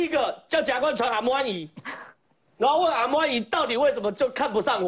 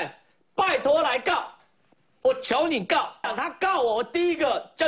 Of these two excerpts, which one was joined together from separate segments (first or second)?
second